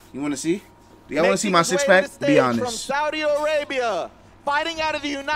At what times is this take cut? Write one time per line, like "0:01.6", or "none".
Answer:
none